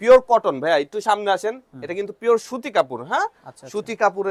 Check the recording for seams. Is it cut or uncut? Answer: uncut